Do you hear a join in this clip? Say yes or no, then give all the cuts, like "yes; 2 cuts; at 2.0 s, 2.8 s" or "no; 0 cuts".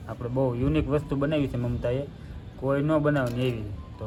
no; 0 cuts